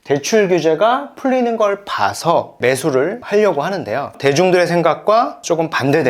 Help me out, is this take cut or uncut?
cut